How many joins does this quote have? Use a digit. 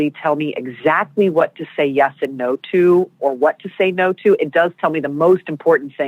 1